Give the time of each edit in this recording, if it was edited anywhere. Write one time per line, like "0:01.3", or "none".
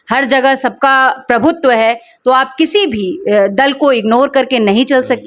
none